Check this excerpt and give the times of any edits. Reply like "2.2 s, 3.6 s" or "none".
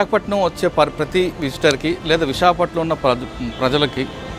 none